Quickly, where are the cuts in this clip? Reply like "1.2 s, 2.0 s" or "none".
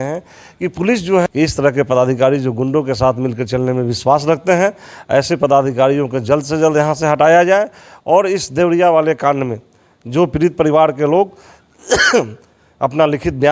1.2 s